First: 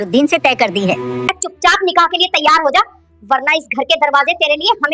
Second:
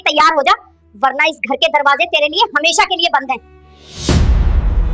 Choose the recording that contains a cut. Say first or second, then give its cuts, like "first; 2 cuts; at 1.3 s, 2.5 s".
first; 1 cut; at 1.1 s